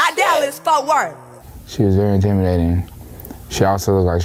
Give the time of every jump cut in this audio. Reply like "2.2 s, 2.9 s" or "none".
none